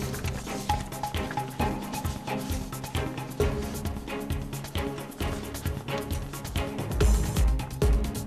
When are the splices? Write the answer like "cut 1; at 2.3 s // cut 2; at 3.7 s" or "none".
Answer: cut 1; at 7.3 s